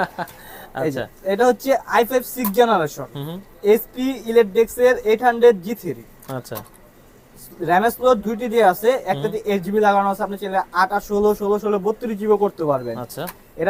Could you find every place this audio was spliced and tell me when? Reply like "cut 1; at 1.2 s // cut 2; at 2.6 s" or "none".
none